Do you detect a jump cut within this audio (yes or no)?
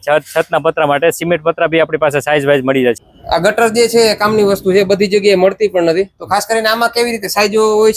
yes